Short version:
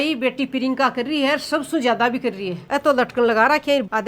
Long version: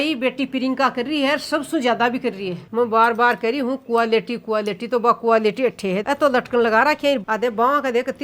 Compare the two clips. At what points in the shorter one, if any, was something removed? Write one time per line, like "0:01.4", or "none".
0:02.7

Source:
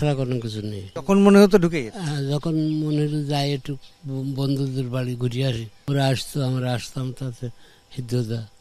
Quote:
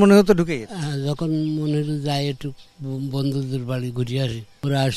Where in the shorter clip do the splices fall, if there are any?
none

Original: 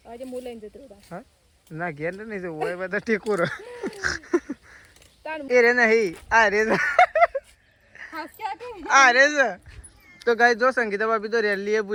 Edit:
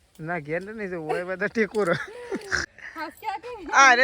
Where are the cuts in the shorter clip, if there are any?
0:02.6

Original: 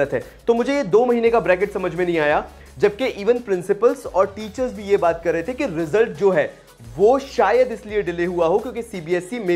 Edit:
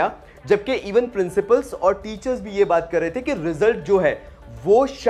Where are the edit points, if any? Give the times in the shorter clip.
none

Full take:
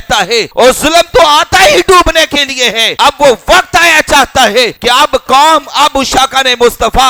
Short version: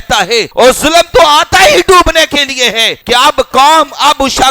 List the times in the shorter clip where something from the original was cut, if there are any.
0:02.9

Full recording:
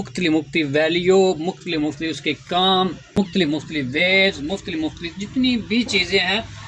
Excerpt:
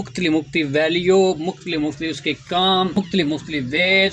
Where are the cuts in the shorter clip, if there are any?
0:02.9

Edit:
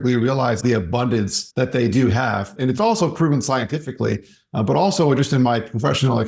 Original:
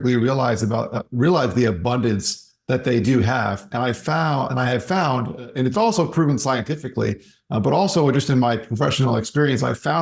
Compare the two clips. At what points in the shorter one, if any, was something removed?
0:01.1
0:02.5

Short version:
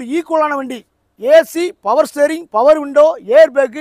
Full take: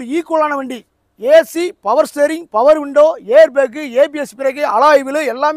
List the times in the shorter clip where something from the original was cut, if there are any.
none

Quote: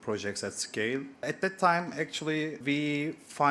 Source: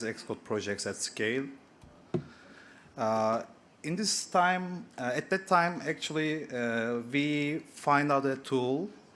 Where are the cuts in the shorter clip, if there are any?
0:01.2
0:02.6

